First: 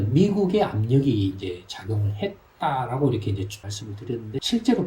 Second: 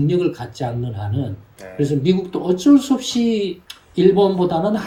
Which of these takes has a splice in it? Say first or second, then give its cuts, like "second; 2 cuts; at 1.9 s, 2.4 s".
first; 1 cut; at 3.8 s